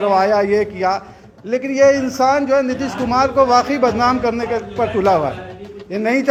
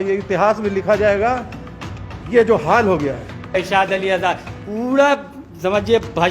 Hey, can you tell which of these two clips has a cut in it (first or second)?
second